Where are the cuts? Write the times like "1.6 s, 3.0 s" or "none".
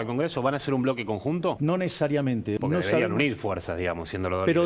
1.6 s, 2.6 s